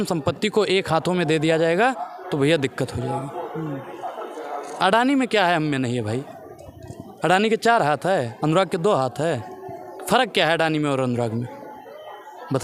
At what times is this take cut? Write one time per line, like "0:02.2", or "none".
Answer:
none